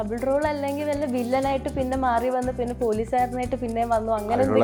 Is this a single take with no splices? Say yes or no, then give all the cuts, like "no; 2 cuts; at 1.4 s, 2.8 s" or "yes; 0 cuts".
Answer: yes; 0 cuts